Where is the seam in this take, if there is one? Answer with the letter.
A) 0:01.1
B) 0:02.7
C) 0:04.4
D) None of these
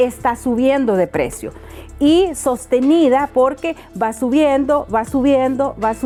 D